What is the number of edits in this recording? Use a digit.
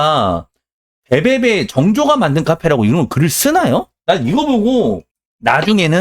1